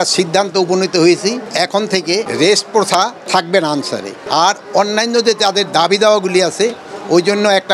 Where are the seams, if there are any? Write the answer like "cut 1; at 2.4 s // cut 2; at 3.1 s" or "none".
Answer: cut 1; at 2.0 s // cut 2; at 3.2 s // cut 3; at 4.2 s